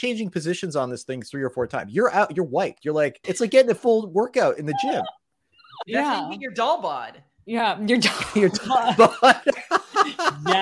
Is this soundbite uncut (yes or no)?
no